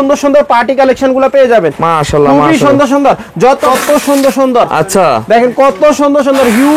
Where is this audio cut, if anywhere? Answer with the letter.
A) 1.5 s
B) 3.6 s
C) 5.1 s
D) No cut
B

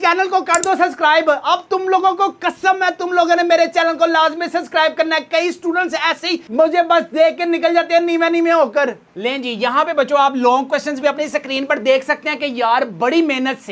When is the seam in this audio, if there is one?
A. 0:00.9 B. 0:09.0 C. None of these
B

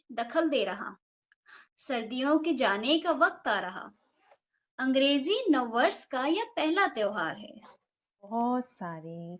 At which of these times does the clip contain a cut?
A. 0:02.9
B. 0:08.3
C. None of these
B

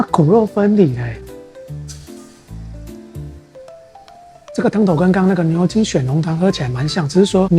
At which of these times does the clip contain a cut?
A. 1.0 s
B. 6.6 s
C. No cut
C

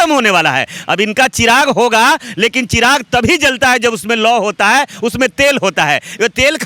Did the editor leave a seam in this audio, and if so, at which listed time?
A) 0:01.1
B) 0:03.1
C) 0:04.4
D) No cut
D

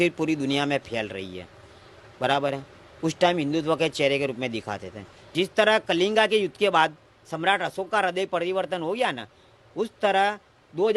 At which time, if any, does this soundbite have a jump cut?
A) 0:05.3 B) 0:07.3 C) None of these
A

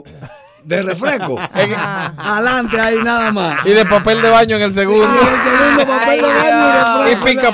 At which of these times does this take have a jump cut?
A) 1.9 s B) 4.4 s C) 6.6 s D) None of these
D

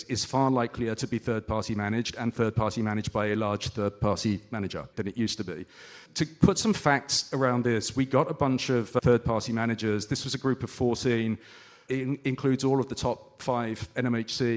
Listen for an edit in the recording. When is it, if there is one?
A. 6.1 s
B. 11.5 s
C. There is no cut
C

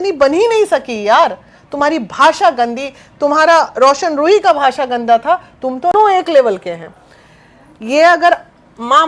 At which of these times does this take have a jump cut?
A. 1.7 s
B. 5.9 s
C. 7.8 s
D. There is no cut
B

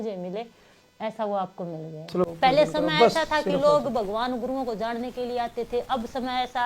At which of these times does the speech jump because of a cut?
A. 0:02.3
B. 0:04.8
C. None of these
A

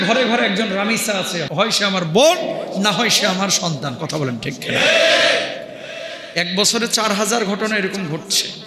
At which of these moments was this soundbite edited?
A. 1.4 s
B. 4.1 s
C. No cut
A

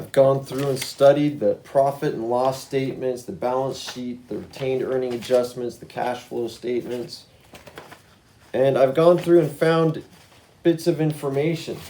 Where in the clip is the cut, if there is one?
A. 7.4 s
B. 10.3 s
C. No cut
C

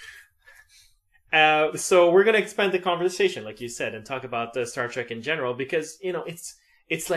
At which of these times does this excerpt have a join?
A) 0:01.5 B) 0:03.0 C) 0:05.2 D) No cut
B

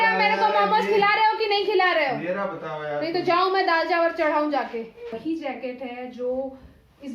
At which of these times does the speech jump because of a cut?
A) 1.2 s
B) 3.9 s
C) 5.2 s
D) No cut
C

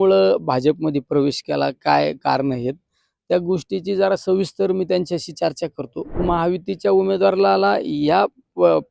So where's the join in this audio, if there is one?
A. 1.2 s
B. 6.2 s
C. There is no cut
B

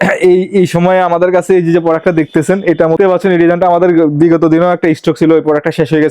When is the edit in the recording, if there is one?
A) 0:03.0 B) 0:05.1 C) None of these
A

